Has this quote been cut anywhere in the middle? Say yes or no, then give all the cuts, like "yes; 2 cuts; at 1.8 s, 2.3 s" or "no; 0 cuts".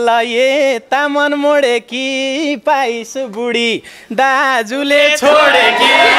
no; 0 cuts